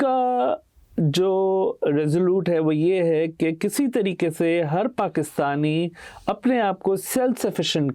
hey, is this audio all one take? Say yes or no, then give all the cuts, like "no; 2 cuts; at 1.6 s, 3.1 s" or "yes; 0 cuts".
yes; 0 cuts